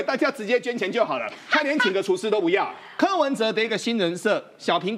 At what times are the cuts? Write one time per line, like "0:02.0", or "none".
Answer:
0:02.8